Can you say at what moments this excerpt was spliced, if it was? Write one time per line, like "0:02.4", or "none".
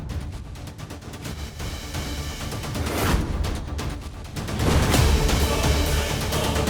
none

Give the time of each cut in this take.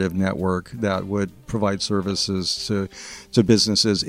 0:01.5

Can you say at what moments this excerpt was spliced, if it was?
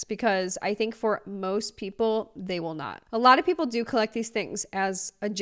none

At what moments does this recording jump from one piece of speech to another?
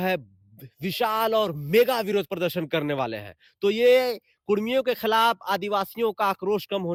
none

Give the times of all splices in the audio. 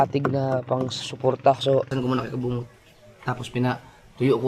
0:01.9

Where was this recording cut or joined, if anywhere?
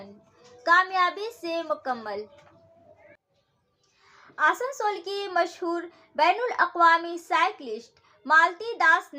0:03.4

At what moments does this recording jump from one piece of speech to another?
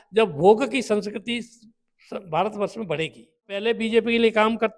0:03.6

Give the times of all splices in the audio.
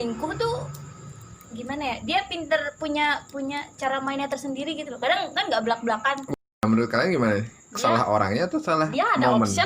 0:06.3

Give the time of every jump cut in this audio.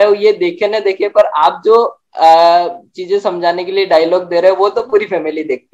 none

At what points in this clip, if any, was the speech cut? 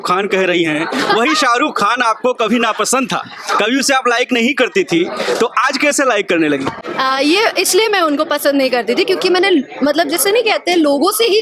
none

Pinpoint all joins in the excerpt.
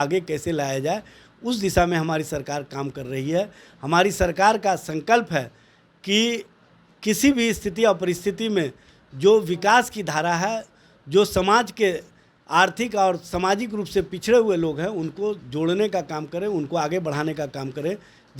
none

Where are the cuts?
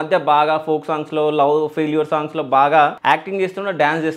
0:03.0

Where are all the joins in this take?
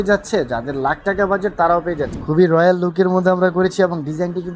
0:02.1

